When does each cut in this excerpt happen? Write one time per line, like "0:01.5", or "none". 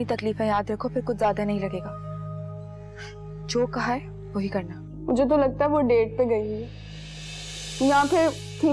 0:04.8